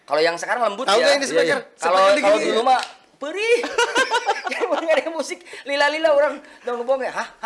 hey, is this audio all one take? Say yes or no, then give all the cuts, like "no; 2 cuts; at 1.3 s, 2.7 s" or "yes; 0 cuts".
yes; 0 cuts